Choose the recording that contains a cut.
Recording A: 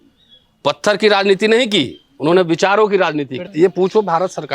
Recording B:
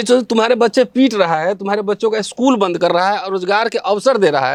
A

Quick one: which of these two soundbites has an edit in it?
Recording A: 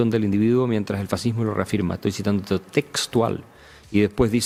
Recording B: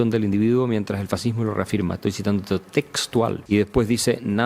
B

